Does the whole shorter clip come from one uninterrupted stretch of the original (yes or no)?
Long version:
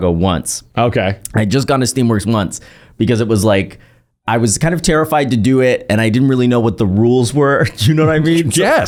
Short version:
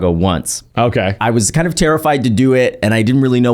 no